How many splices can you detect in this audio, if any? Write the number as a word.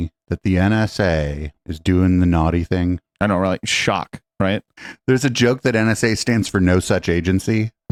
zero